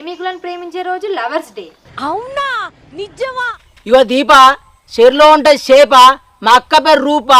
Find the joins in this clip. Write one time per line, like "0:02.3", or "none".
0:03.6